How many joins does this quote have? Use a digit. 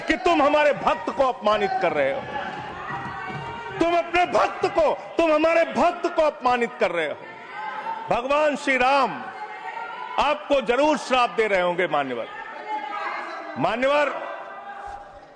0